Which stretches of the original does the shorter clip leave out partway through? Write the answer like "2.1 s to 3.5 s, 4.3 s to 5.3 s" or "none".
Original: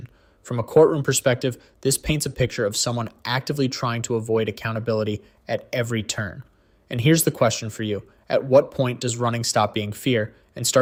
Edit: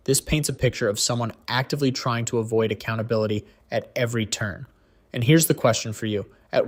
none